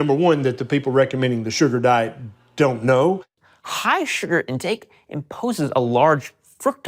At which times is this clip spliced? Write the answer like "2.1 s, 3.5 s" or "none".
3.3 s